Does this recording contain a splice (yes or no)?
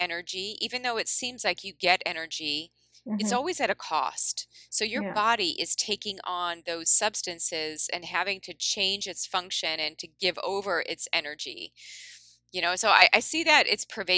no